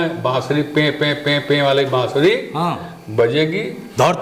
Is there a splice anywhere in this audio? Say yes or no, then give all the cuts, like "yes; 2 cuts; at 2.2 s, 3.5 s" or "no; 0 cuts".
no; 0 cuts